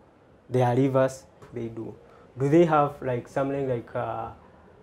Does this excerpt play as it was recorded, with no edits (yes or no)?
no